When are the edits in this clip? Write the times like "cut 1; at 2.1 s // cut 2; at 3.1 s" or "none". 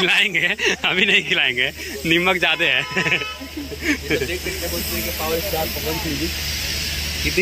none